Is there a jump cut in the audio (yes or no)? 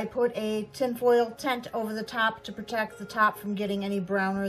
no